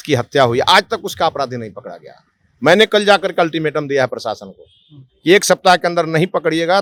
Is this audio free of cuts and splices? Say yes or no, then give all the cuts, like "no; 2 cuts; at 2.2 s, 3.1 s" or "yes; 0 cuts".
yes; 0 cuts